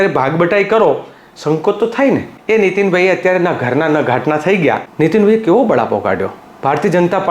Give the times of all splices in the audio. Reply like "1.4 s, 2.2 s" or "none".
2.3 s, 4.9 s